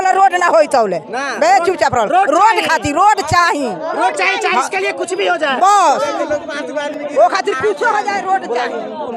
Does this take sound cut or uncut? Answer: uncut